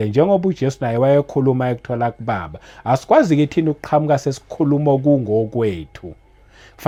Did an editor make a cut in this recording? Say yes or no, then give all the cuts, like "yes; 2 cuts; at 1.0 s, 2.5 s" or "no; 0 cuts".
no; 0 cuts